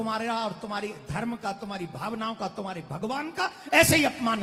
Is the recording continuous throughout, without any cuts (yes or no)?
yes